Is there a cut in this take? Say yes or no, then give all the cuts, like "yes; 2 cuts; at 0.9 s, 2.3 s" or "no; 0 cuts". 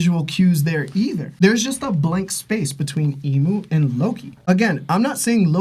no; 0 cuts